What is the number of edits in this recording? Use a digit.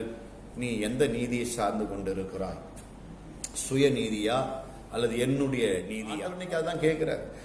1